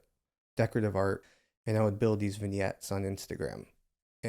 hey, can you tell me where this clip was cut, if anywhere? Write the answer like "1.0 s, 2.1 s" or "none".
1.3 s